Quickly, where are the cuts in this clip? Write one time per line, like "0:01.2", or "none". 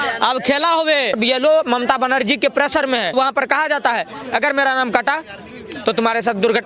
0:01.2
0:03.1